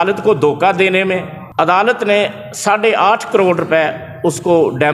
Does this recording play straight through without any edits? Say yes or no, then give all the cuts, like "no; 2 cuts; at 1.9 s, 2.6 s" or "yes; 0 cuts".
no; 1 cut; at 1.4 s